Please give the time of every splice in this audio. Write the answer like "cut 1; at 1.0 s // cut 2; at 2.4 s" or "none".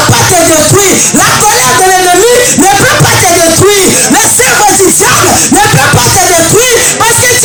none

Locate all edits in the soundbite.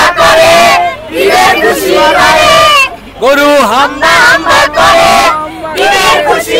none

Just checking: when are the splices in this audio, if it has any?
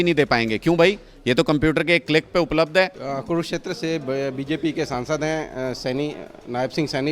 cut 1; at 3.0 s

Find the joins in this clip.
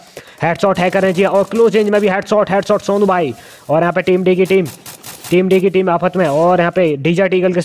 none

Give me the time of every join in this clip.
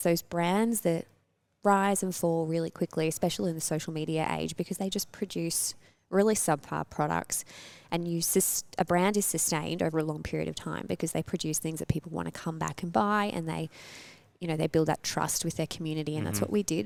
none

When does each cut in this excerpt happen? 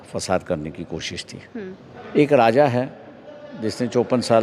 cut 1; at 2.0 s

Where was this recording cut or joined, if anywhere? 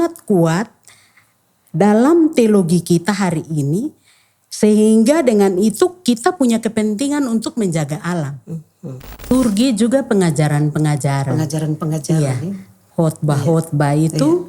cut 1; at 9.2 s

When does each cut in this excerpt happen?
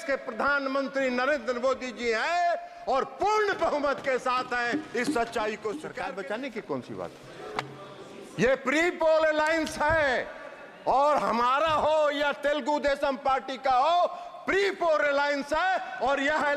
cut 1; at 5.9 s

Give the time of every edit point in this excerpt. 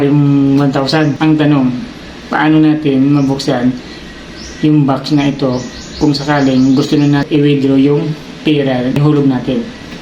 cut 1; at 1.2 s // cut 2; at 7.3 s // cut 3; at 9.0 s

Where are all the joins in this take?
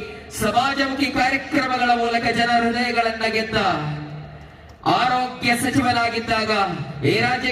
none

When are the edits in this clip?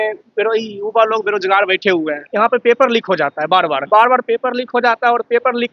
cut 1; at 2.2 s // cut 2; at 3.8 s

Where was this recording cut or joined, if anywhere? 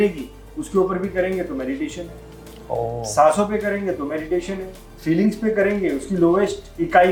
none

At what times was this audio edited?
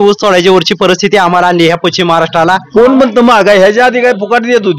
cut 1; at 2.7 s

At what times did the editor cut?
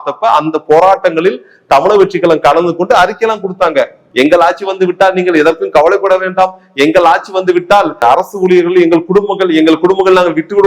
cut 1; at 4.0 s // cut 2; at 8.0 s

